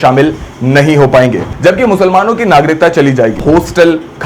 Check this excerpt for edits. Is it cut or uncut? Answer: cut